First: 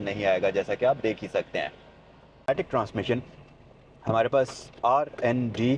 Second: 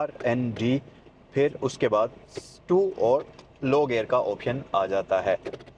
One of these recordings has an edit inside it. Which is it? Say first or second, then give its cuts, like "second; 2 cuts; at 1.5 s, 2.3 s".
first; 1 cut; at 2.5 s